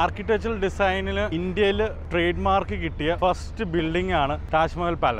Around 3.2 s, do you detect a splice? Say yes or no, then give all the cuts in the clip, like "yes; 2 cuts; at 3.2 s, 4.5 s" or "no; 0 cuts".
yes; 4 cuts; at 1.3 s, 2.0 s, 3.2 s, 4.4 s